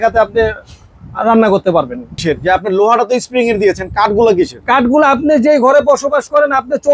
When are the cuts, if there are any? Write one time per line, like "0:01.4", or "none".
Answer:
0:02.2